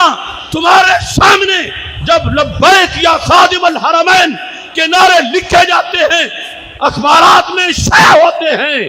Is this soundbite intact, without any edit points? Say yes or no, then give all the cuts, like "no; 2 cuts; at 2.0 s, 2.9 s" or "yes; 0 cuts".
yes; 0 cuts